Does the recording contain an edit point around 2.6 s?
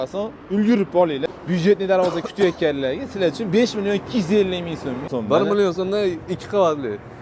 no; 2 cuts; at 1.2 s, 5.1 s

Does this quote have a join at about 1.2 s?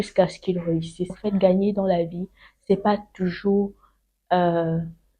yes; 1 cut; at 1.2 s

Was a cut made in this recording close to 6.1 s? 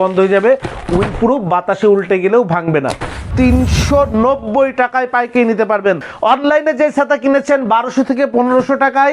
yes; 2 cuts; at 3.3 s, 6.1 s

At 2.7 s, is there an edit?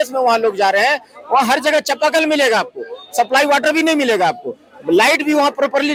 no; 0 cuts

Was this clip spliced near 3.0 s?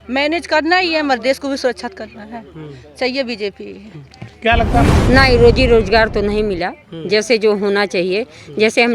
no; 1 cut; at 4.8 s

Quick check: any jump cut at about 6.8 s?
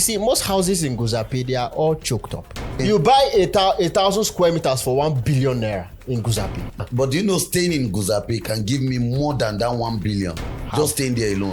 yes; 2 cuts; at 2.7 s, 6.8 s

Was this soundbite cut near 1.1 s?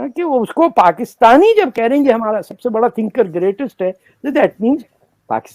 no; 0 cuts

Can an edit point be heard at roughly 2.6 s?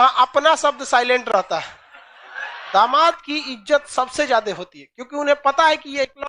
yes; 1 cut; at 2.6 s

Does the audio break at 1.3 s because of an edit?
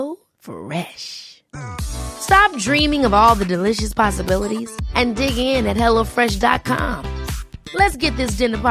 no; 0 cuts

